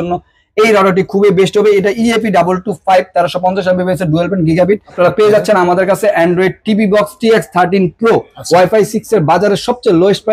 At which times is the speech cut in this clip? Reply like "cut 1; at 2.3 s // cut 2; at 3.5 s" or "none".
cut 1; at 4.9 s // cut 2; at 8.3 s